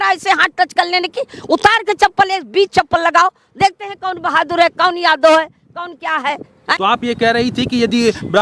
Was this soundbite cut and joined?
yes; 1 cut; at 6.7 s

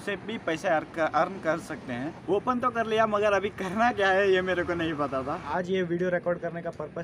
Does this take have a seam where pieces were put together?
yes; 2 cuts; at 2.2 s, 5.4 s

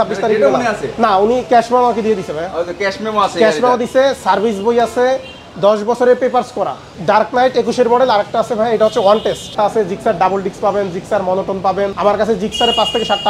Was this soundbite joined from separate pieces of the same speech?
yes; 3 cuts; at 6.8 s, 9.5 s, 11.9 s

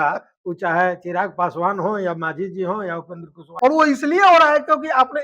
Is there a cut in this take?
yes; 1 cut; at 3.5 s

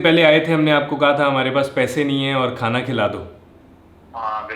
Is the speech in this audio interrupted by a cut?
no; 0 cuts

